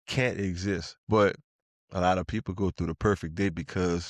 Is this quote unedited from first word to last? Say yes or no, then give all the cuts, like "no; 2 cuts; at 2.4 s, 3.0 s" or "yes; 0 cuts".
no; 1 cut; at 0.9 s